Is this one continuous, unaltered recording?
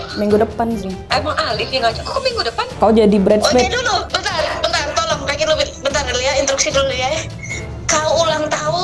no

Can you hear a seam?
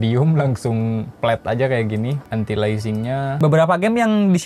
yes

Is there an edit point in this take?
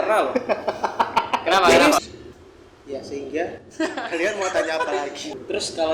yes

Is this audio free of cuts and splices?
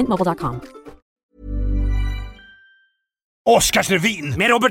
no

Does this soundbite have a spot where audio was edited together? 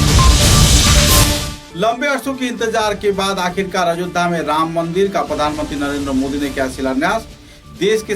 yes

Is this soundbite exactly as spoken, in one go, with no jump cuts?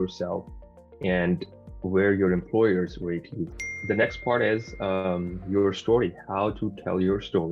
no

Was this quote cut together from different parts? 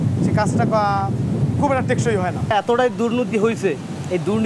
yes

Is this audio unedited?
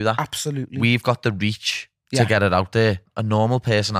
no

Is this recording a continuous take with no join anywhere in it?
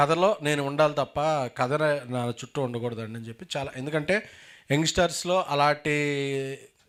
yes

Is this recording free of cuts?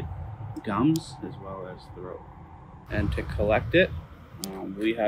yes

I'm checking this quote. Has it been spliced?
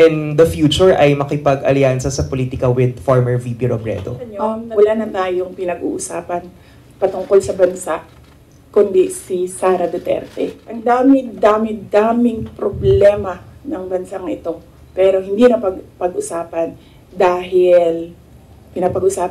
yes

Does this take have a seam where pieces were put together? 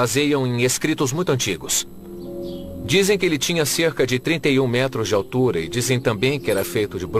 yes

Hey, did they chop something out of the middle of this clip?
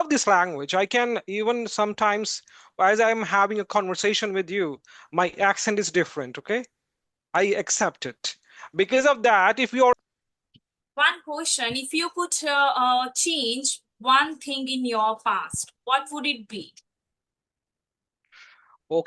yes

